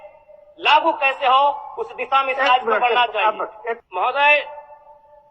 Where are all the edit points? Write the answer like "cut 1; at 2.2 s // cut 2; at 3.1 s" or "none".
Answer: cut 1; at 3.8 s

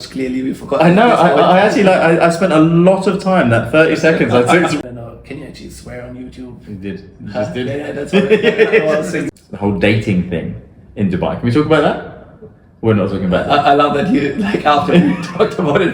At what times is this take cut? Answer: cut 1; at 4.8 s // cut 2; at 9.3 s

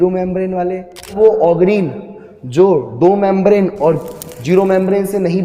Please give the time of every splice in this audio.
cut 1; at 1.2 s

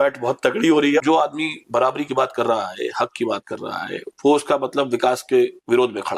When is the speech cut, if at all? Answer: cut 1; at 1.0 s

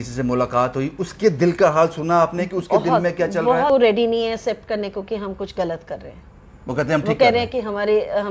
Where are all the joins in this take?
cut 1; at 3.7 s

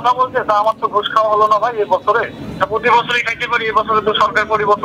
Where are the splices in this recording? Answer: cut 1; at 2.4 s

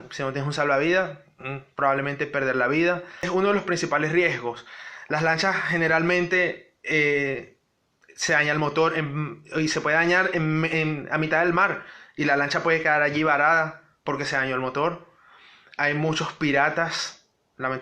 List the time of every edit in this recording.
cut 1; at 3.2 s

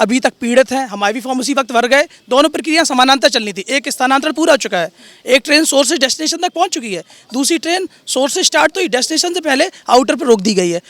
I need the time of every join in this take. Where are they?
none

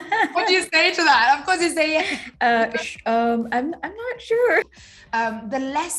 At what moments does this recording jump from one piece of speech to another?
cut 1; at 4.7 s

